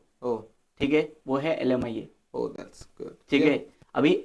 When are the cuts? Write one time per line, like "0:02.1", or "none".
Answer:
none